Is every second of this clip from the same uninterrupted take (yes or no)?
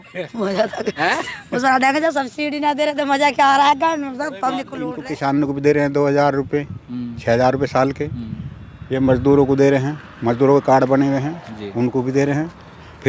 no